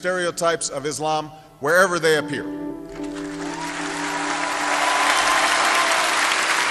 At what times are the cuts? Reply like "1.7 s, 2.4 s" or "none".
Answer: none